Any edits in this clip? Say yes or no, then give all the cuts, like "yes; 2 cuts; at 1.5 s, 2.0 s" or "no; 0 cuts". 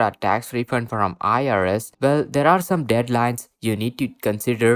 no; 0 cuts